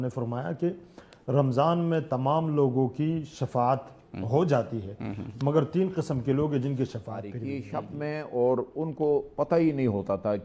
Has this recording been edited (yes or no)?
yes